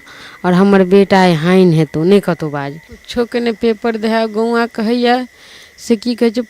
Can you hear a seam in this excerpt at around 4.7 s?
no; 1 cut; at 3.0 s

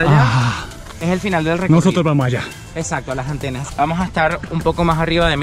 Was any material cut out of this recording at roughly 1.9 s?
no; 1 cut; at 3.6 s

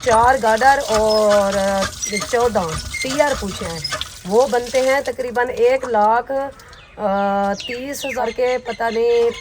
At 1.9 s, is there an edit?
no; 2 cuts; at 3.6 s, 8.2 s

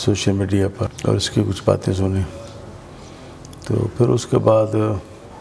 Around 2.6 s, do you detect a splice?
no; 1 cut; at 0.9 s

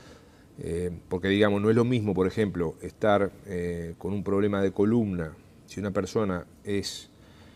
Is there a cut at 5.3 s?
no; 1 cut; at 2.1 s

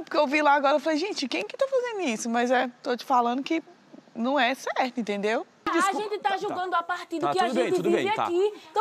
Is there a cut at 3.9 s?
no; 1 cut; at 5.7 s

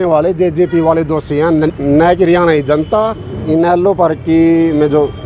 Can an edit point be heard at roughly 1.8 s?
yes; 2 cuts; at 1.8 s, 3.3 s

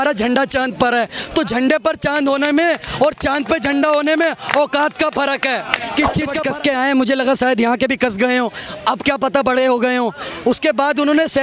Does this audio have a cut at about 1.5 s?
no; 1 cut; at 6.4 s

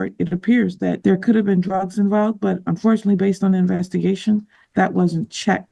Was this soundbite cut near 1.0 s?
yes; 1 cut; at 1.0 s

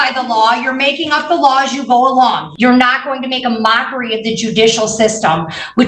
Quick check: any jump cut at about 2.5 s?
yes; 1 cut; at 2.5 s

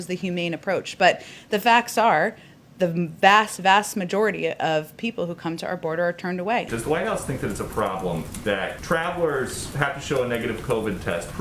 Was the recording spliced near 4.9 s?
no; 1 cut; at 6.7 s

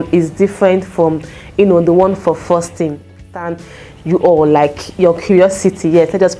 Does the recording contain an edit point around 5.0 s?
no; 1 cut; at 3.3 s

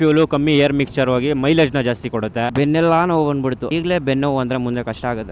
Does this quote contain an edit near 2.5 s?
yes; 1 cut; at 2.5 s

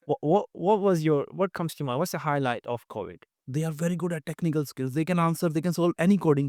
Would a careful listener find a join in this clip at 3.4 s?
yes; 1 cut; at 3.4 s

